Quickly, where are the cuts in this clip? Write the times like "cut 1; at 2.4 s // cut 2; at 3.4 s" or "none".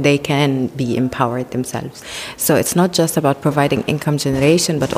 none